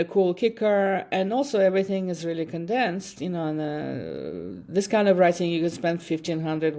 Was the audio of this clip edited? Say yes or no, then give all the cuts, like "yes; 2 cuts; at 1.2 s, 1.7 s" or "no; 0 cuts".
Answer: no; 0 cuts